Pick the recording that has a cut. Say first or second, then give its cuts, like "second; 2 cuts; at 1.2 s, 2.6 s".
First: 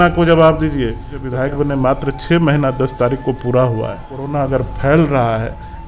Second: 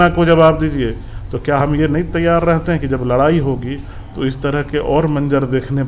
first; 2 cuts; at 1.2 s, 4.3 s